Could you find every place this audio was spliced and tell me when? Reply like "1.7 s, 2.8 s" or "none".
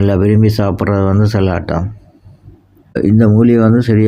3.0 s